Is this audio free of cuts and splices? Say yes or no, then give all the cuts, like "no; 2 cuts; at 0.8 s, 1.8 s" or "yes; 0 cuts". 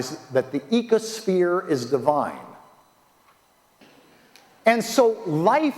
no; 1 cut; at 3.8 s